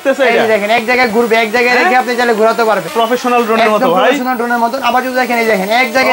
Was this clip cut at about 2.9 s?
yes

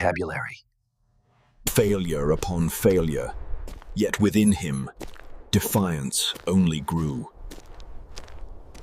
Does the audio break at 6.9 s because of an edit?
no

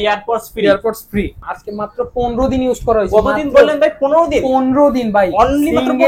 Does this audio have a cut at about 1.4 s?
yes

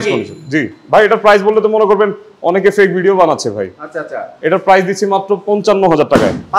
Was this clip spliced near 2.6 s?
no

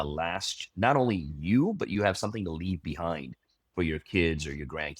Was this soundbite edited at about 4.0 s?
no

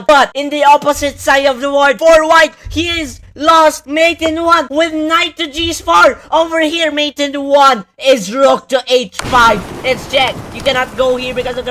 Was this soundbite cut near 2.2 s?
no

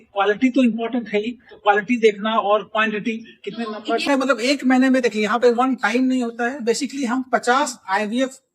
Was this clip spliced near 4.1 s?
yes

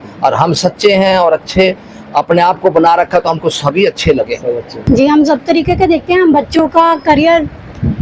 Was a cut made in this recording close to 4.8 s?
yes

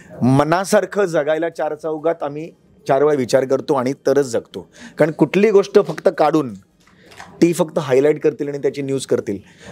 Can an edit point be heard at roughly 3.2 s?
no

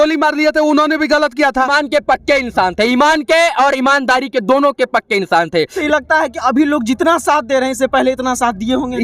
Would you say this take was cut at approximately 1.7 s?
yes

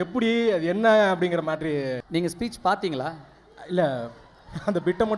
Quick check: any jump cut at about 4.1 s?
no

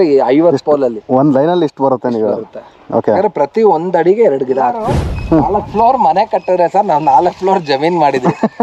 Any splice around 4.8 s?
yes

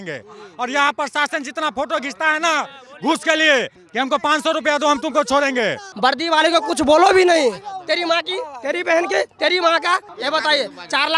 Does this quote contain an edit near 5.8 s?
yes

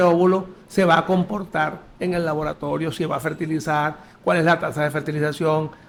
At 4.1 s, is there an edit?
no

